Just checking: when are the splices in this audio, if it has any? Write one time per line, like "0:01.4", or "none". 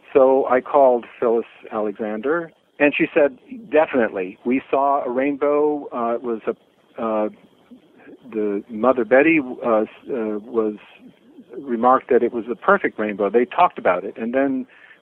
none